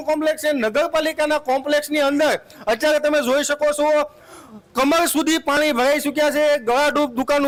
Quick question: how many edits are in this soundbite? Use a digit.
0